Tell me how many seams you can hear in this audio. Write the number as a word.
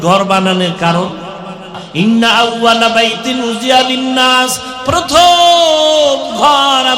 one